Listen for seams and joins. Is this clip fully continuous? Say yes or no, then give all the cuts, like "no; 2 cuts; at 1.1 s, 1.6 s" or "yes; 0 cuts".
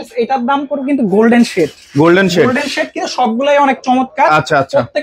yes; 0 cuts